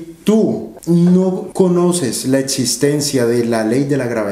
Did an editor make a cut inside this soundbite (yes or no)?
yes